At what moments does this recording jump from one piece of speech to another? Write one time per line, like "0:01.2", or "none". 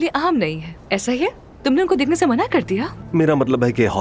0:02.9